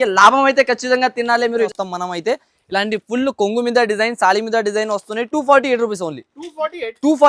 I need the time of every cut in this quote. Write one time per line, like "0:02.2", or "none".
0:01.7